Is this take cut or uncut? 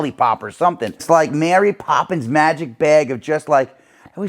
cut